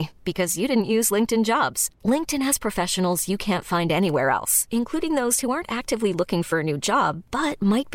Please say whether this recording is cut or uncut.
uncut